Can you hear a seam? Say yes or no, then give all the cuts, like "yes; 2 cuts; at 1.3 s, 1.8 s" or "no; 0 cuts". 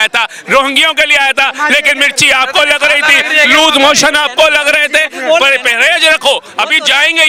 no; 0 cuts